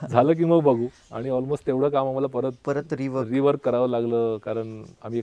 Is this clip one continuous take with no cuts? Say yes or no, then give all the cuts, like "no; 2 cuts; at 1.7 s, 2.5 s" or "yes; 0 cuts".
yes; 0 cuts